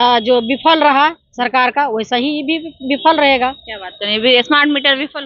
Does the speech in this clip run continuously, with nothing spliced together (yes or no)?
yes